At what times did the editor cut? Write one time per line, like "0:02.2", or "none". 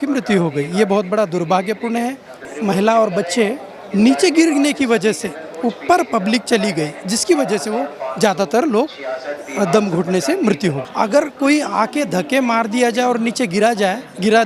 0:02.5
0:10.8